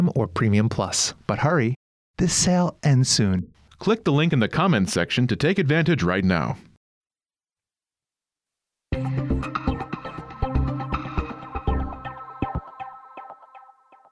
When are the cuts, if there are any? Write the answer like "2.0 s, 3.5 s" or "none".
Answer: none